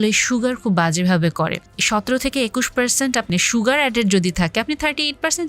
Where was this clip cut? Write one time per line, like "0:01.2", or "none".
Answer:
0:01.7
0:03.3